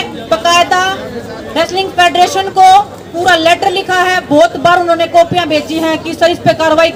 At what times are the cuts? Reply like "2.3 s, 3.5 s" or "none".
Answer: none